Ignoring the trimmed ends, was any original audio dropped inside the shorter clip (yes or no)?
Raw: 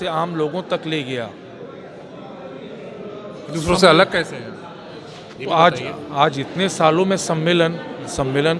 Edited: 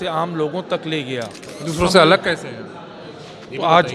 yes